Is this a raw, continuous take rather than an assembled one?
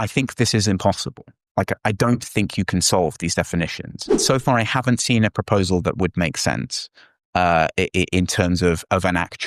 no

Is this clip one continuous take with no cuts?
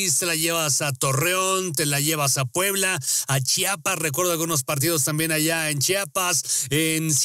yes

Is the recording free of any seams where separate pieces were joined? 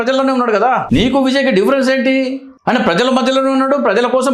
no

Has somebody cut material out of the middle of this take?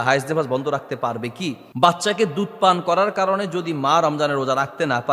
yes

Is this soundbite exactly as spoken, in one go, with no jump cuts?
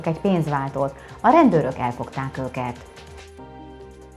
yes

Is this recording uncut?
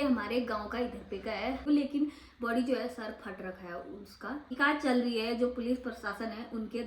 no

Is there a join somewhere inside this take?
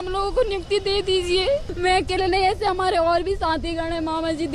no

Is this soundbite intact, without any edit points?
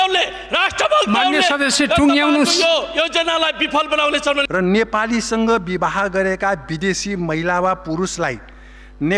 no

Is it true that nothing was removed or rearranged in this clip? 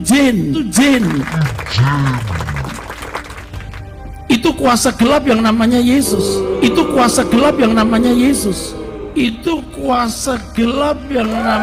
yes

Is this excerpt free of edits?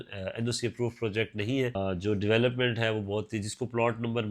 no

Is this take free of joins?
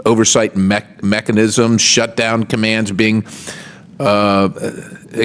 yes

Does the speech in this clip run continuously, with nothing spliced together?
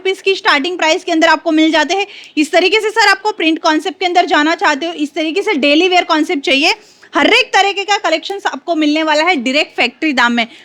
yes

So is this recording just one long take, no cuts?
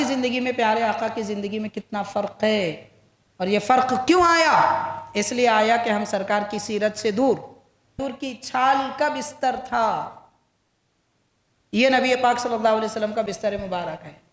no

